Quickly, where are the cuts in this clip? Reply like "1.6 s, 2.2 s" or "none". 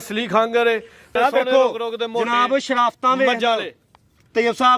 1.1 s

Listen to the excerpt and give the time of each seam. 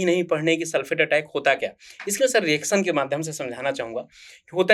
none

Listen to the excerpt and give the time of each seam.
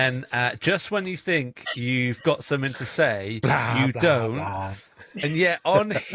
none

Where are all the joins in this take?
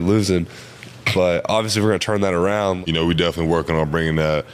2.8 s

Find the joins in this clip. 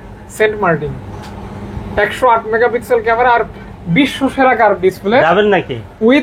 none

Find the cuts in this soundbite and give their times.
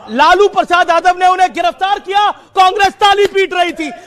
none

